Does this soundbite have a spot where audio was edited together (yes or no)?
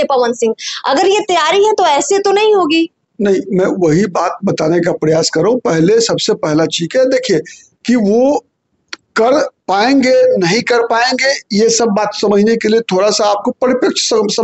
no